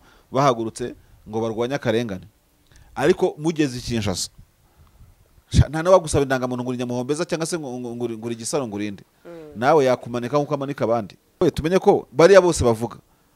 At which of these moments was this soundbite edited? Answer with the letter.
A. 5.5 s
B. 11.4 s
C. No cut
B